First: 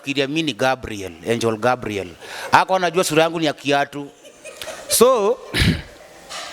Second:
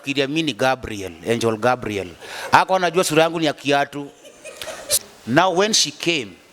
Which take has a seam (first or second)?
second